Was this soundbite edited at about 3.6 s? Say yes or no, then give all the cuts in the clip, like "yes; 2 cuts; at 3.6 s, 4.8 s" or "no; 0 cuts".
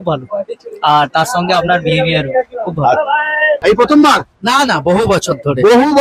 yes; 1 cut; at 3.6 s